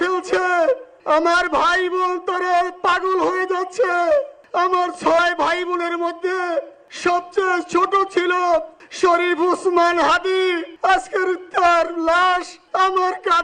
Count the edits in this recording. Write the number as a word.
six